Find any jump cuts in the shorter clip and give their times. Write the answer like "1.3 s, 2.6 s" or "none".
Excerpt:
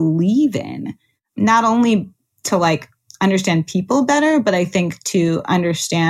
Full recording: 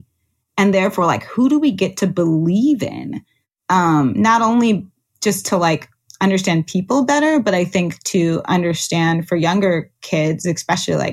1.4 s, 2.4 s

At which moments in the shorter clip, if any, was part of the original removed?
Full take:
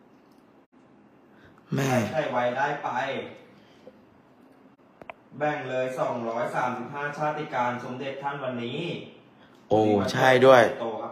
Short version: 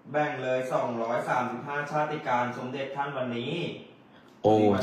none

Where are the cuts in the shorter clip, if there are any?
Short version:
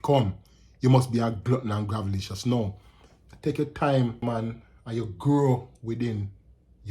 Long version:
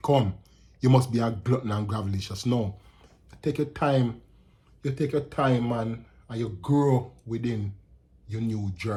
4.2 s

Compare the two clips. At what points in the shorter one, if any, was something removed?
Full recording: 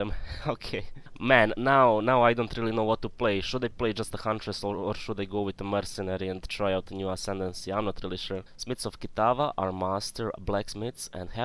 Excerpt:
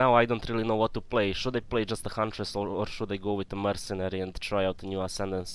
none

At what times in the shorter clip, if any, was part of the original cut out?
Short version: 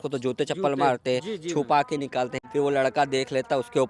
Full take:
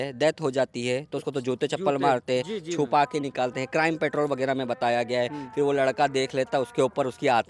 2.4 s

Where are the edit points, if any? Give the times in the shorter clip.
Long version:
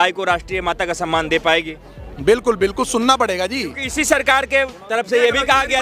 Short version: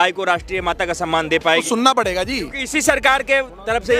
1.6 s

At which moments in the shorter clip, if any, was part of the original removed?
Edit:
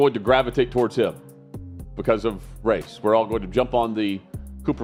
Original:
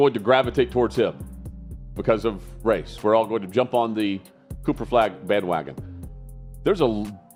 none

